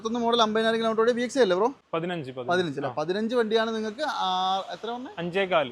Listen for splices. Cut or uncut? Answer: cut